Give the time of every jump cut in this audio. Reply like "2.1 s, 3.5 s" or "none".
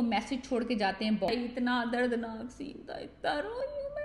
1.3 s